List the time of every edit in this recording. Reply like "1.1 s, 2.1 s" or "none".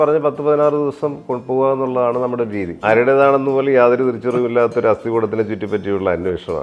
2.8 s

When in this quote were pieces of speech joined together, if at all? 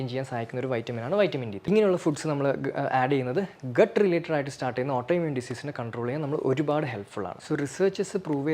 1.7 s

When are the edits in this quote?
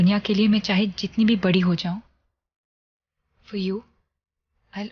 3.8 s

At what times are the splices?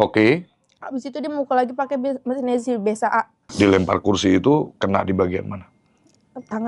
3.5 s

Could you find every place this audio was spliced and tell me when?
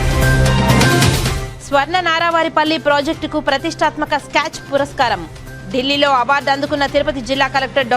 1.3 s

